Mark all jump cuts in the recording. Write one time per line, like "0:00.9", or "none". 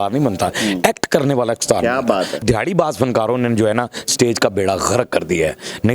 0:02.4